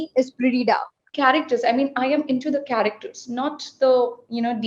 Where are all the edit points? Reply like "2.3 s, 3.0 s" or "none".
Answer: 1.1 s